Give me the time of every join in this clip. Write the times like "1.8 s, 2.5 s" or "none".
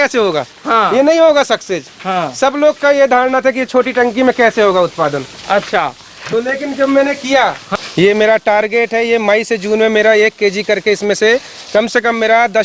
7.6 s